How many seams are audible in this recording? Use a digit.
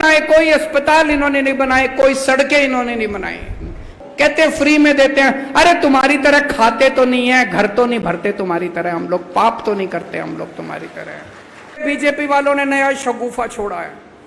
1